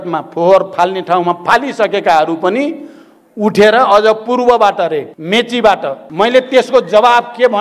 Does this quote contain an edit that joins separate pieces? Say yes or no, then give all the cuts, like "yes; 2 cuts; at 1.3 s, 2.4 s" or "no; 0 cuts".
yes; 2 cuts; at 5.1 s, 6.0 s